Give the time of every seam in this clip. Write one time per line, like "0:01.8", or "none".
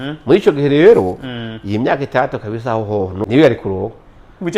0:03.2